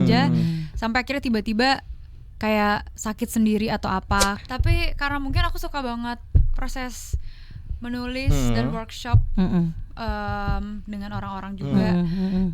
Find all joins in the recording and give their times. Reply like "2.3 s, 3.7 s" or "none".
4.4 s